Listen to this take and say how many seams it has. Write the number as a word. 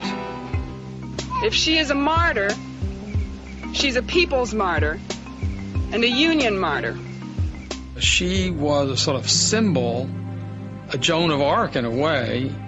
zero